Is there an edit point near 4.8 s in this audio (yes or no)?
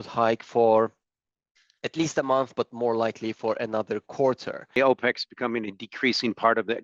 yes